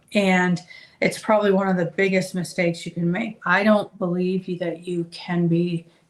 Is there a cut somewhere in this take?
yes; 1 cut; at 3.3 s

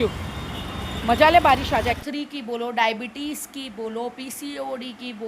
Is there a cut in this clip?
yes; 1 cut; at 2.0 s

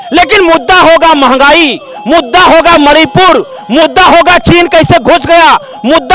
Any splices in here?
no; 0 cuts

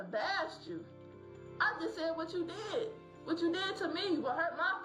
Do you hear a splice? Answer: no; 0 cuts

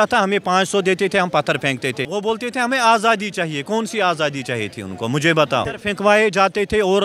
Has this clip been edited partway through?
yes; 2 cuts; at 2.1 s, 5.8 s

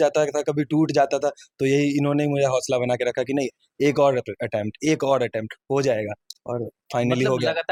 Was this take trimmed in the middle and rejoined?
no; 0 cuts

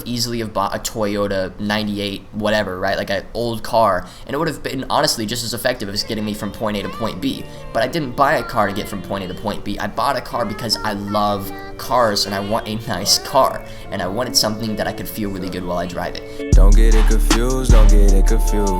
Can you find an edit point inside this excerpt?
yes; 1 cut; at 16.2 s

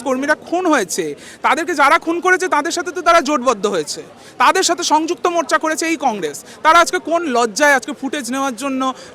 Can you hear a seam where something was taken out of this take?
no; 0 cuts

